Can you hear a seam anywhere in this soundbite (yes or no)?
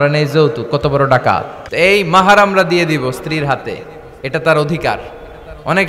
yes